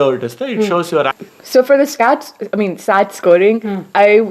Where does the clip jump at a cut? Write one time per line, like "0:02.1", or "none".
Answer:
0:01.2